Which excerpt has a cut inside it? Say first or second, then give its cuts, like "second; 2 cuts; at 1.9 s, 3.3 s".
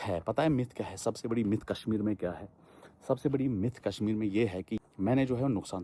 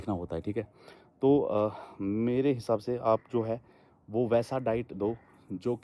first; 1 cut; at 4.8 s